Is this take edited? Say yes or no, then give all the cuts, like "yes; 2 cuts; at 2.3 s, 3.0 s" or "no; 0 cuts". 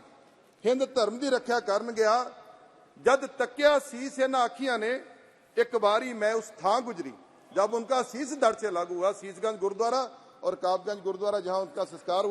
no; 0 cuts